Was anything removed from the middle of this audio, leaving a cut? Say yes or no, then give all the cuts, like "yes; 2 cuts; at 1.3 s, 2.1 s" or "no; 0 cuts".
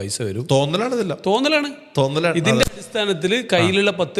no; 0 cuts